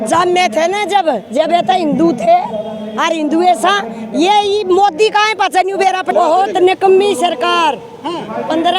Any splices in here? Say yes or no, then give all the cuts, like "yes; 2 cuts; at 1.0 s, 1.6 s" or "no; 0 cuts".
yes; 1 cut; at 6.1 s